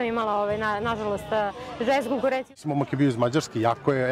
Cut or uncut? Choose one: cut